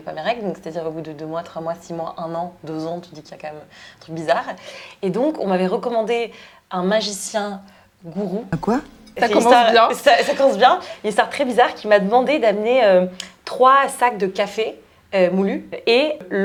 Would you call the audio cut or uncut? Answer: uncut